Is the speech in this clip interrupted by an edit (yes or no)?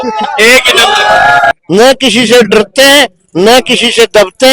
yes